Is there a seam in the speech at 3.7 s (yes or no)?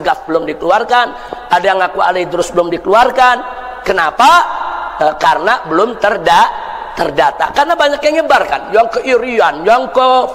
no